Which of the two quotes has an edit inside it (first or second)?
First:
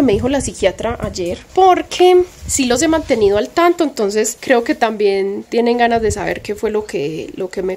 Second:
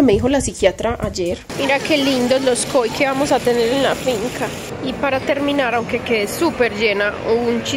second